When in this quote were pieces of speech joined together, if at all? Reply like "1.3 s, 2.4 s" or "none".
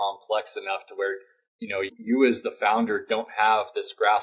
1.9 s